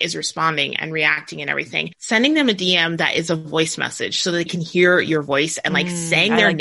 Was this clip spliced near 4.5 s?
yes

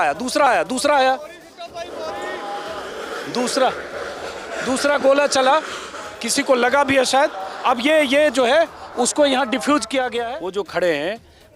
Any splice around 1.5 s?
no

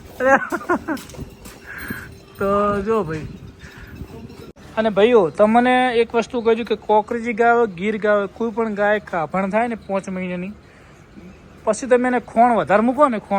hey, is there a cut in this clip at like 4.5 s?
yes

